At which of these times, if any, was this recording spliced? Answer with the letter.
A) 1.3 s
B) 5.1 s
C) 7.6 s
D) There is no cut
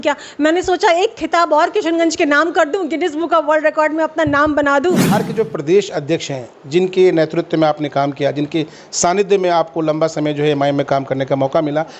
B